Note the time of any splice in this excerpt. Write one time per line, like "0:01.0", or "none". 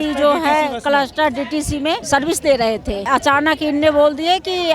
0:02.0
0:03.0